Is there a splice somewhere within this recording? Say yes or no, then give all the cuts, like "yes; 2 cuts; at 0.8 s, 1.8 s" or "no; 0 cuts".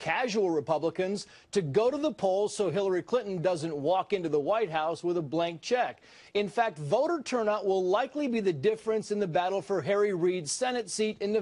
no; 0 cuts